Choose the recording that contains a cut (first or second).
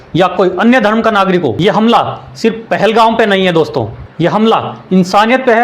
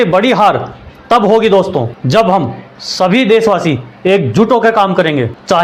first